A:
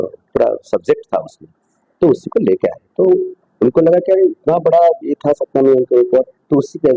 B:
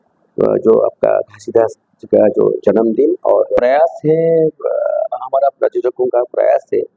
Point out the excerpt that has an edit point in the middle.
B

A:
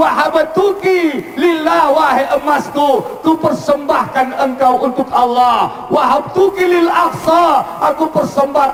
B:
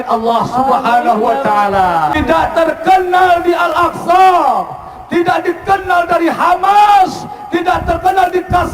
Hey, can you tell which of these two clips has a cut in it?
B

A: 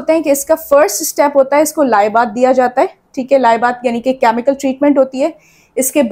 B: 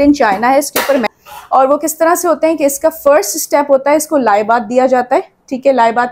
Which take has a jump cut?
B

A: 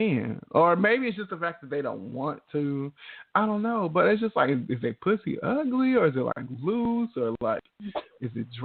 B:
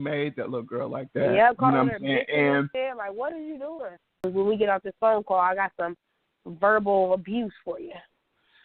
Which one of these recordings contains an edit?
B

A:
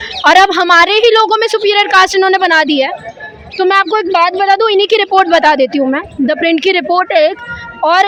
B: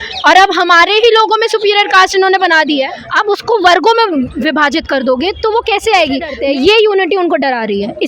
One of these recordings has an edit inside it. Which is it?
B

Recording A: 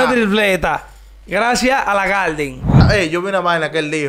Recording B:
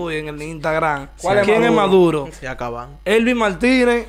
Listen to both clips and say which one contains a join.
A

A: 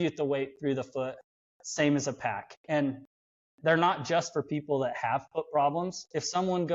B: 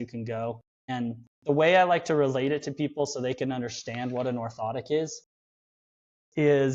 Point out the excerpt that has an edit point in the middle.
B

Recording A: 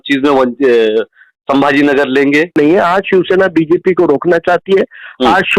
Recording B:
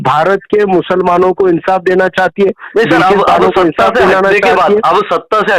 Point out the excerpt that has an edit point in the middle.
A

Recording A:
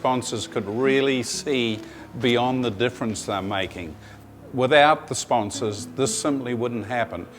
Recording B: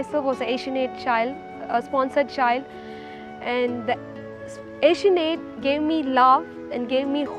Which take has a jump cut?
A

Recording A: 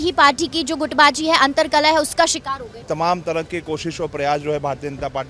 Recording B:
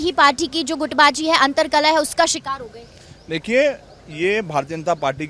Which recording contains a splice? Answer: A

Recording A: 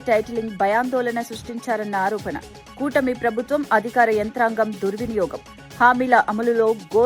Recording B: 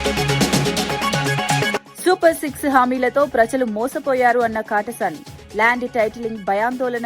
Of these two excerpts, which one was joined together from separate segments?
B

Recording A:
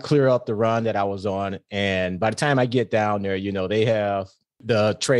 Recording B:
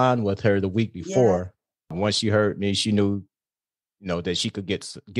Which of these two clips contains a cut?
B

